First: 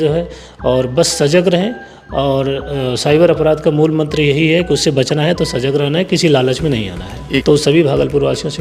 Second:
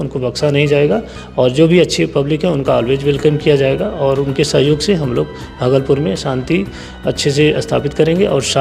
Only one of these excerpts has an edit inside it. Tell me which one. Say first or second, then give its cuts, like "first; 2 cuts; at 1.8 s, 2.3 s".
first; 1 cut; at 7.4 s